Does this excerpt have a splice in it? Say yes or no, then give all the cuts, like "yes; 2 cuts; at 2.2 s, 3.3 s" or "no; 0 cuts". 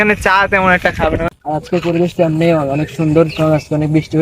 yes; 1 cut; at 1.2 s